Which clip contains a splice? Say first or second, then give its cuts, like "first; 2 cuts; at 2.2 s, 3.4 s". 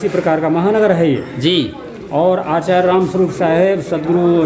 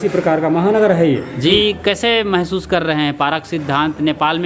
second; 1 cut; at 1.5 s